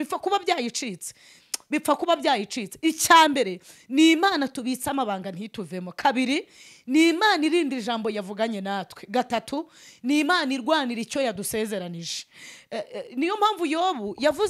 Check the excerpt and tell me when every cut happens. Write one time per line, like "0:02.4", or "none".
none